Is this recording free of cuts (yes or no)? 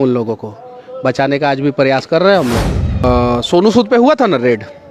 no